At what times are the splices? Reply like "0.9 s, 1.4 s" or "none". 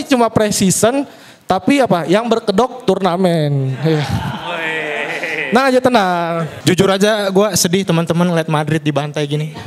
6.5 s